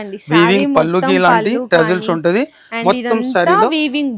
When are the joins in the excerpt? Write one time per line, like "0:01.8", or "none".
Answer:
none